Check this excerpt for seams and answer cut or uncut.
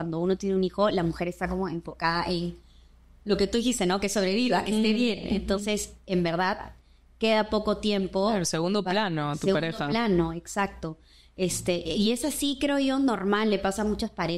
uncut